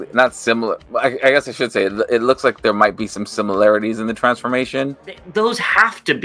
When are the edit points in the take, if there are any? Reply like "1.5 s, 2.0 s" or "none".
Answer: 5.1 s